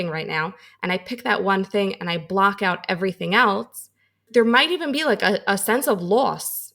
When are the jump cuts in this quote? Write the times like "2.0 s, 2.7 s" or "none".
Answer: 4.2 s